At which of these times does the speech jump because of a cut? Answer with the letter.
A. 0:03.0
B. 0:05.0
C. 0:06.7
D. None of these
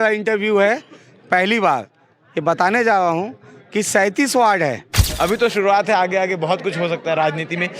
B